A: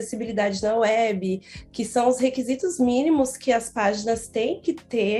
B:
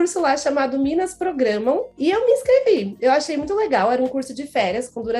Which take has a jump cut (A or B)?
B